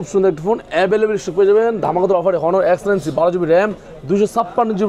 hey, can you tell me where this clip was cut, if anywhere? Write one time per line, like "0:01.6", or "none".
none